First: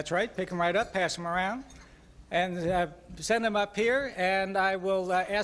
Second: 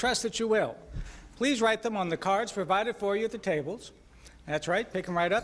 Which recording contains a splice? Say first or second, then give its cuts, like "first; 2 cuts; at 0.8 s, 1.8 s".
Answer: second; 1 cut; at 2.0 s